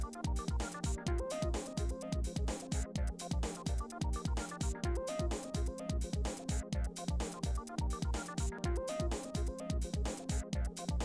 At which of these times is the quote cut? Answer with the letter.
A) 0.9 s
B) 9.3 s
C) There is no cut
C